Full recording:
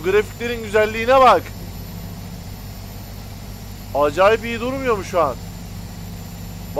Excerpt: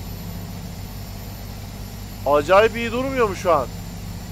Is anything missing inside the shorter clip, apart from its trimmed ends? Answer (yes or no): no